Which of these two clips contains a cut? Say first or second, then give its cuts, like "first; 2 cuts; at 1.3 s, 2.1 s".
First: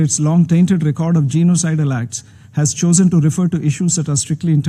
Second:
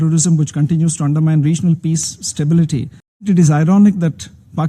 second; 1 cut; at 3.3 s